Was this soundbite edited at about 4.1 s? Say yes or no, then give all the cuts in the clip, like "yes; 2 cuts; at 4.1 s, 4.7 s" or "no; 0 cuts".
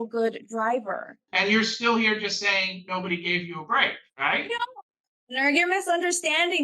yes; 2 cuts; at 1.1 s, 4.1 s